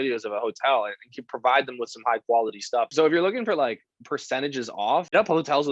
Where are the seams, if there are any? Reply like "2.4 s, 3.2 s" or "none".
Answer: 2.9 s